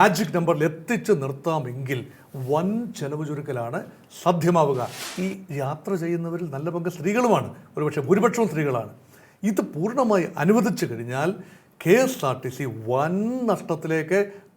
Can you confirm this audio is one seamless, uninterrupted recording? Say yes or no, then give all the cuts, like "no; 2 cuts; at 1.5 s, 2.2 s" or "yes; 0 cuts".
no; 1 cut; at 5.0 s